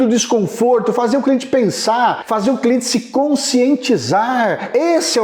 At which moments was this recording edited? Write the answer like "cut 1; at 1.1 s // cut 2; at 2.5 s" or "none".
cut 1; at 2.2 s

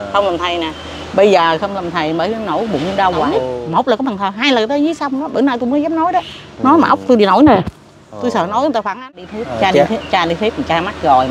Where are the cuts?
cut 1; at 3.5 s // cut 2; at 9.2 s

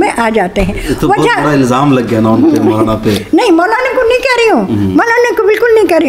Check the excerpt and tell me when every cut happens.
none

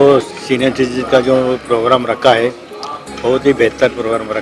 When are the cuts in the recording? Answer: none

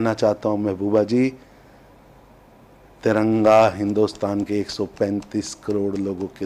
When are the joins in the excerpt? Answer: none

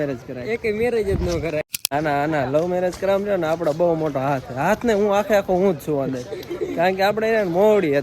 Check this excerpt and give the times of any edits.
cut 1; at 1.9 s

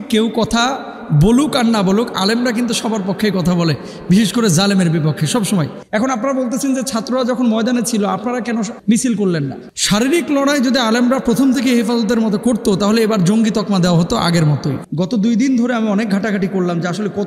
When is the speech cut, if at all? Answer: cut 1; at 5.8 s // cut 2; at 9.6 s // cut 3; at 14.8 s

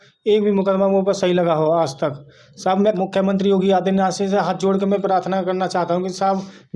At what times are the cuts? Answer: cut 1; at 2.9 s

